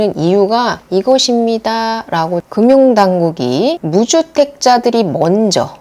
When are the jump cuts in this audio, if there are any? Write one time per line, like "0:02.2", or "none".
0:02.5